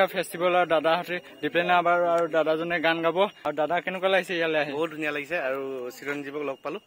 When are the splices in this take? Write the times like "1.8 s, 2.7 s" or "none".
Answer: 3.4 s